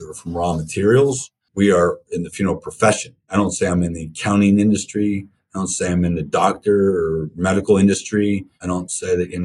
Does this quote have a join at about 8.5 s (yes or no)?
yes